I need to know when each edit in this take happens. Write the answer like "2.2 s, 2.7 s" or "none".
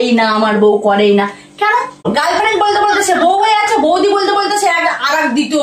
2.1 s